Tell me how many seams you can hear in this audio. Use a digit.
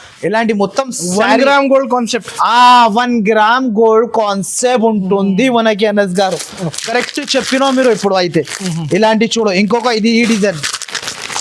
0